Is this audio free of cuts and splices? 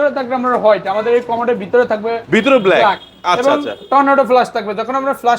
yes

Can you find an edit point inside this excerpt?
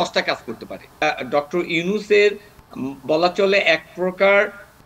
yes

